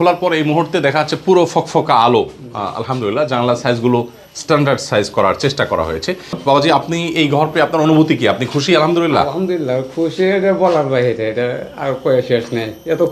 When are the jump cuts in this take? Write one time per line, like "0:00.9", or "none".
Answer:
0:06.3